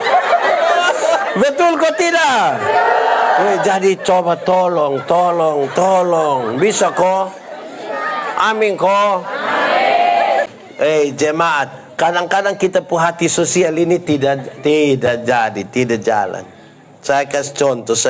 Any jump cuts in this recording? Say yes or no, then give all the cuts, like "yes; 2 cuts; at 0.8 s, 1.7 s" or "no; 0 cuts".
yes; 1 cut; at 10.5 s